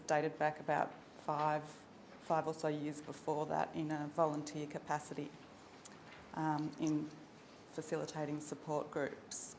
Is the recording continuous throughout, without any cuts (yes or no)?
yes